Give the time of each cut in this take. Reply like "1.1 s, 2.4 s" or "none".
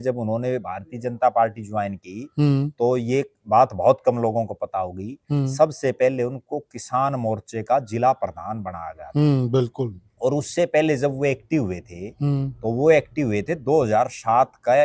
none